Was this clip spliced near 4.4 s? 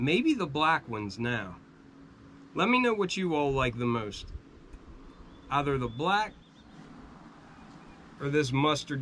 no; 1 cut; at 6.6 s

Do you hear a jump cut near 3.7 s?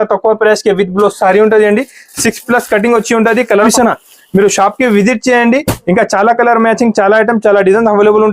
yes; 1 cut; at 3.7 s

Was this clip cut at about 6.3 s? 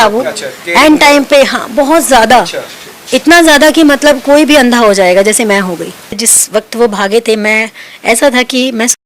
yes; 1 cut; at 6.3 s

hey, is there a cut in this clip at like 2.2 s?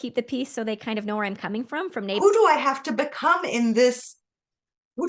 yes; 1 cut; at 2.2 s

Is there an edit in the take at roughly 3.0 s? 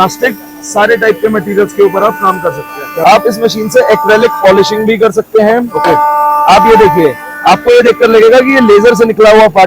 yes; 1 cut; at 3.0 s

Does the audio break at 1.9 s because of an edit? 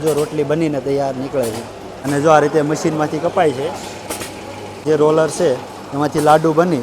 yes; 2 cuts; at 1.9 s, 4.8 s

